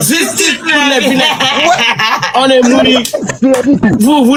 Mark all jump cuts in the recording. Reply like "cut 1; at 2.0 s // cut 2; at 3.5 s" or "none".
none